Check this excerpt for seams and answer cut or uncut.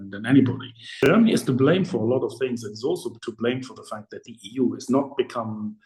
cut